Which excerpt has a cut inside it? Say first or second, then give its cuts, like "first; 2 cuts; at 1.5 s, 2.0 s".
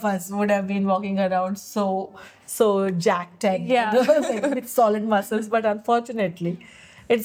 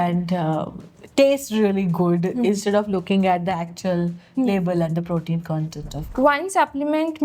second; 1 cut; at 6.0 s